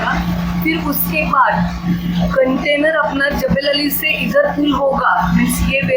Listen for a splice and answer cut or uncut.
uncut